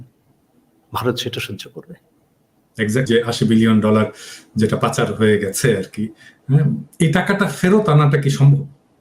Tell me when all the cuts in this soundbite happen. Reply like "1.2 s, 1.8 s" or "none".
3.3 s